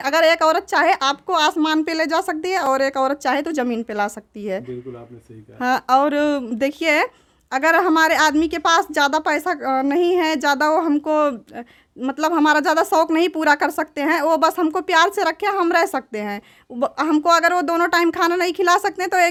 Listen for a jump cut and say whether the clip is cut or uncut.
uncut